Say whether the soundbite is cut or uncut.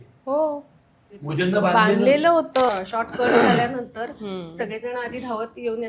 cut